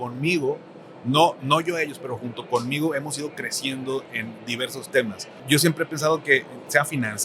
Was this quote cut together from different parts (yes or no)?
yes